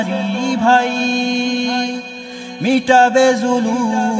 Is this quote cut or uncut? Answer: uncut